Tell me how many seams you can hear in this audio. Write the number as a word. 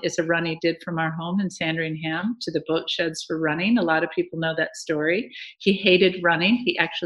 zero